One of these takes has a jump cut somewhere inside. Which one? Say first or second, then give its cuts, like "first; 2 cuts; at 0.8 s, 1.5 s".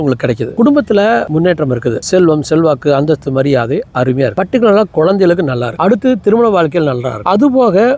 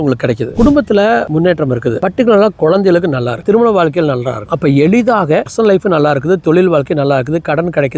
second; 4 cuts; at 2.0 s, 3.4 s, 4.4 s, 5.5 s